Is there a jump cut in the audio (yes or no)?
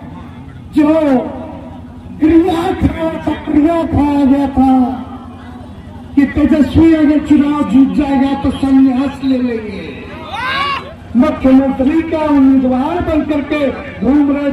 yes